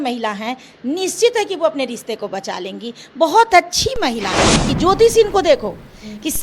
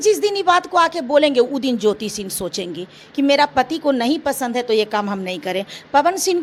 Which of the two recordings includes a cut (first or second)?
first